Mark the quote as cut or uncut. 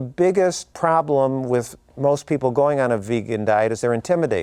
uncut